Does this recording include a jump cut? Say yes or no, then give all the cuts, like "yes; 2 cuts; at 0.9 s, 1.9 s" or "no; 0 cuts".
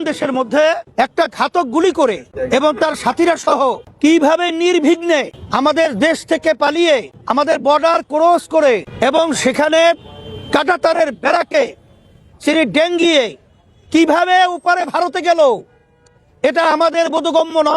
yes; 6 cuts; at 0.8 s, 2.3 s, 3.9 s, 5.4 s, 7.2 s, 8.9 s